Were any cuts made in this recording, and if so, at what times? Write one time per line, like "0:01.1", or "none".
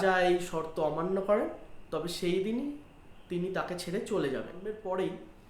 0:04.6